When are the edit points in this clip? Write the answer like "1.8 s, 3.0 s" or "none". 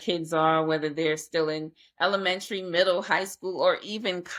none